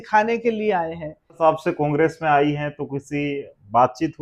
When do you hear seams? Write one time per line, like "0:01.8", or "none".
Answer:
0:01.4